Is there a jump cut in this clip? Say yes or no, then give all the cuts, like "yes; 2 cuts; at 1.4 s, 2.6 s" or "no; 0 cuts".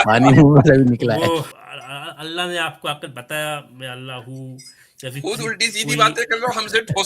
yes; 1 cut; at 1.5 s